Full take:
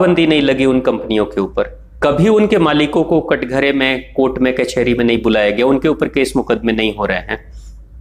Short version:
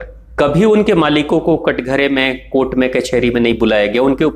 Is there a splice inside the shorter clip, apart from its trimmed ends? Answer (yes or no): no